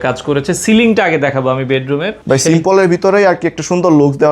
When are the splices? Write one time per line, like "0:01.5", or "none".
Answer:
0:02.1

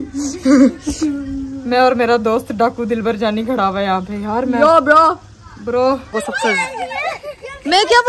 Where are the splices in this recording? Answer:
0:06.1

